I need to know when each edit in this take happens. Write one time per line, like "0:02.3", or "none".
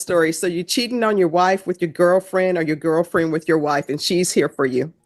none